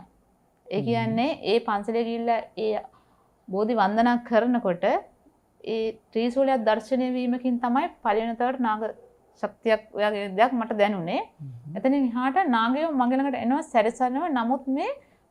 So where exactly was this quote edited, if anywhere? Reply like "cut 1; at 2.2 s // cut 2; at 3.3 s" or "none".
none

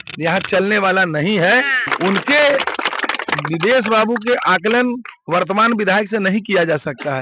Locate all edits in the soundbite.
cut 1; at 1.8 s

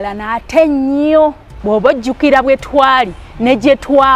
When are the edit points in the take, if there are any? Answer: cut 1; at 1.5 s

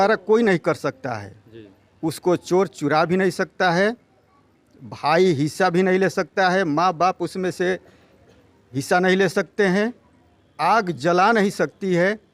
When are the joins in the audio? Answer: none

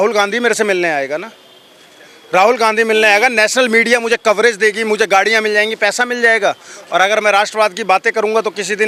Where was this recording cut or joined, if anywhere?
none

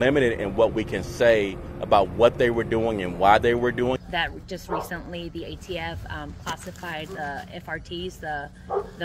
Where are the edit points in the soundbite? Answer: cut 1; at 3.9 s

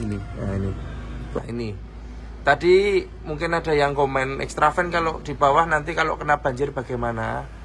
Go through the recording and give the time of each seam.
cut 1; at 1.2 s

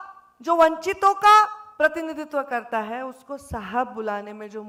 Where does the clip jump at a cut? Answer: none

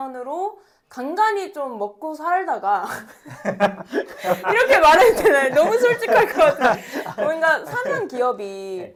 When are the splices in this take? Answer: none

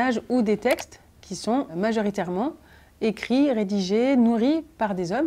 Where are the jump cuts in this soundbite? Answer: cut 1; at 1.7 s

